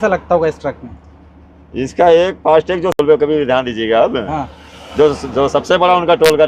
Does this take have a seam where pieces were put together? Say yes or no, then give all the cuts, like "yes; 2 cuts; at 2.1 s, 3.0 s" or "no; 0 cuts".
no; 0 cuts